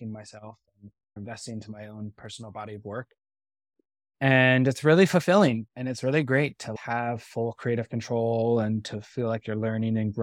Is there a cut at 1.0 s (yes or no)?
yes